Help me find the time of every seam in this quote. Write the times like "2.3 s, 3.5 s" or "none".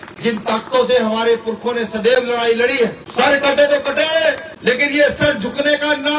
3.0 s, 4.5 s